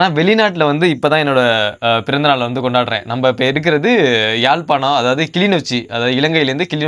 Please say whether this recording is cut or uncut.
uncut